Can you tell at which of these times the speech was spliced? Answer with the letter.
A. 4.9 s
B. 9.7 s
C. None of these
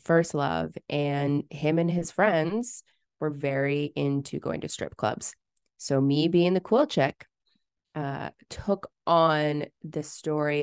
C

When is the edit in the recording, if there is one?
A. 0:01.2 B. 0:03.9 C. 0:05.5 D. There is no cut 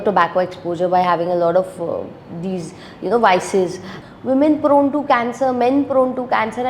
B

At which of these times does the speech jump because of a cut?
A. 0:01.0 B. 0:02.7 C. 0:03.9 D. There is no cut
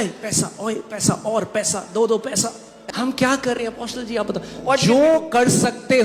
B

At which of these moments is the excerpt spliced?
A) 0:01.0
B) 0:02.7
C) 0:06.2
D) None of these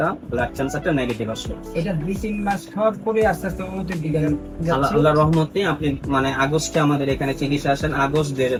D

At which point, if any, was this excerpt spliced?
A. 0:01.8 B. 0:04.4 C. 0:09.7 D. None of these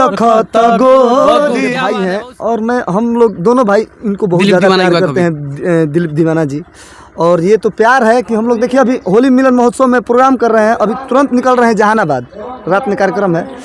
A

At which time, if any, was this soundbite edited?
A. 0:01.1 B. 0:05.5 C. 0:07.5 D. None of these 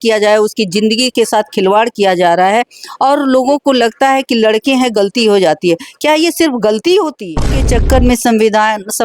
C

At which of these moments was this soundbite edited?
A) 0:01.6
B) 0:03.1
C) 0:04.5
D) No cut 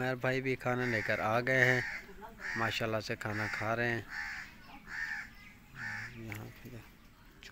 D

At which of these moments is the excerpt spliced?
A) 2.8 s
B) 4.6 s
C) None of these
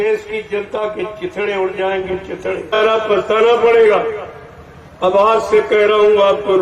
A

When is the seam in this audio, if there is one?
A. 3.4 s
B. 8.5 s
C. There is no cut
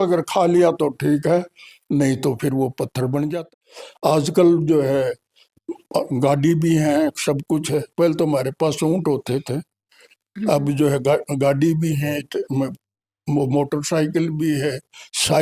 A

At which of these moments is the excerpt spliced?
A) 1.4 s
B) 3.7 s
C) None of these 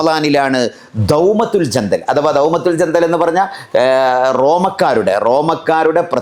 C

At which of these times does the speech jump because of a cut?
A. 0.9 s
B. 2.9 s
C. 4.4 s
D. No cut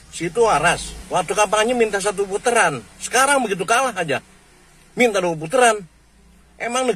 A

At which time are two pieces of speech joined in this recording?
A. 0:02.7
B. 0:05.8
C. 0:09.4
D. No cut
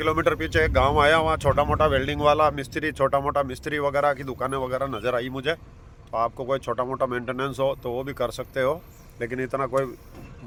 D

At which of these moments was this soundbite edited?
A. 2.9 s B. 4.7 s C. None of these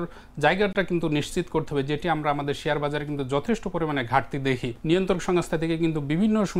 B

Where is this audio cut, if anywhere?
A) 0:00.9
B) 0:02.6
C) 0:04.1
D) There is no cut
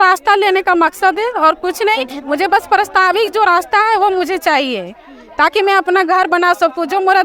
D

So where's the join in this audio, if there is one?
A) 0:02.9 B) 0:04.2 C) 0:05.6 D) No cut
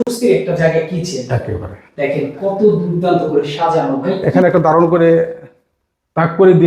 B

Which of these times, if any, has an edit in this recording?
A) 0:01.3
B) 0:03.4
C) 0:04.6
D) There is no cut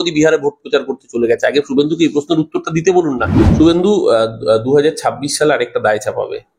B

